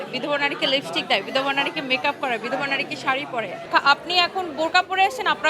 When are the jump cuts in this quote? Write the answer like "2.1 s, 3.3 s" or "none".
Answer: 3.6 s